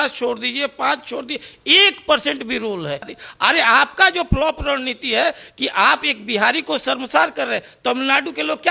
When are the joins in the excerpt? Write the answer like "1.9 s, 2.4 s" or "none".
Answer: 3.2 s